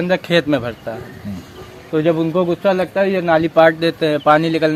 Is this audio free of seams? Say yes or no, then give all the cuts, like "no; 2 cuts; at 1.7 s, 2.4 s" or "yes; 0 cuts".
yes; 0 cuts